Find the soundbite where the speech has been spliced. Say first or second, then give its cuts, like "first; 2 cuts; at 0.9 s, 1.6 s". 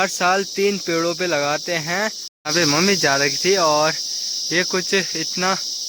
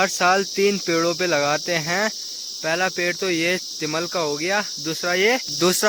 first; 1 cut; at 2.3 s